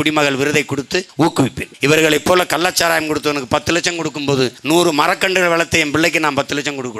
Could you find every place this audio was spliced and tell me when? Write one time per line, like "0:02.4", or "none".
0:01.3
0:04.6